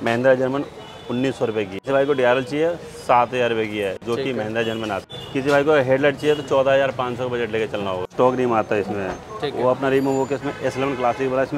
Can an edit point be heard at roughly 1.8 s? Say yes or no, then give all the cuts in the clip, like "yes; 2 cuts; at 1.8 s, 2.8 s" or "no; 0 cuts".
yes; 3 cuts; at 1.8 s, 5.0 s, 8.0 s